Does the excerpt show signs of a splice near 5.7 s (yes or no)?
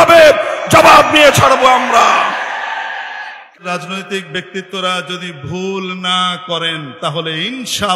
no